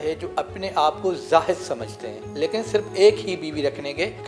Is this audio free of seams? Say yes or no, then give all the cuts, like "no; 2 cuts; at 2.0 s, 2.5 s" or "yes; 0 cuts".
yes; 0 cuts